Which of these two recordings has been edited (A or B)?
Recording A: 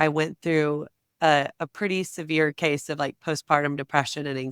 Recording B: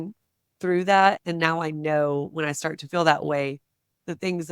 B